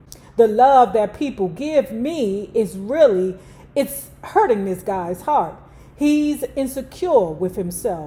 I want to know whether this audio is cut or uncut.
uncut